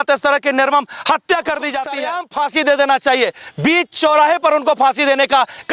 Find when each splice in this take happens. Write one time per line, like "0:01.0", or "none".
0:02.1